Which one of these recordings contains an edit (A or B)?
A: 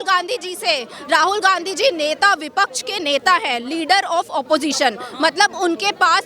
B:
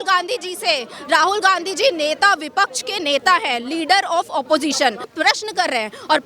B